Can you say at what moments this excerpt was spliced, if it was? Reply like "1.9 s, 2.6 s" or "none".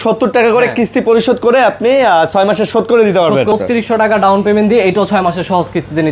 3.5 s